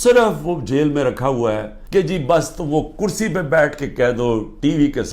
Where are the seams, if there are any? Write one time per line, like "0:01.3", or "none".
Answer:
0:01.7